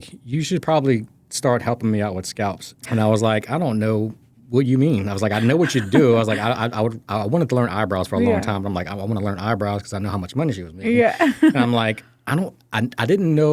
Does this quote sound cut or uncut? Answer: cut